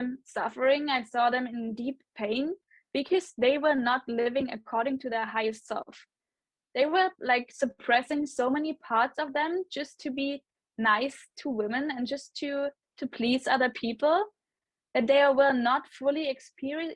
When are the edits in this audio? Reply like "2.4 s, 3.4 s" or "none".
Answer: none